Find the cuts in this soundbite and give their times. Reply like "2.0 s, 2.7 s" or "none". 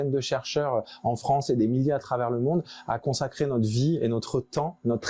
none